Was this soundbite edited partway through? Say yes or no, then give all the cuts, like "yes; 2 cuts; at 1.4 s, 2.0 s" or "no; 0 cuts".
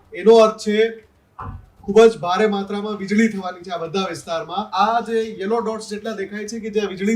yes; 1 cut; at 4.7 s